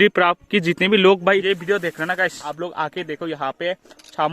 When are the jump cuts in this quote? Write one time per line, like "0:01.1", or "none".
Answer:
0:01.4
0:02.4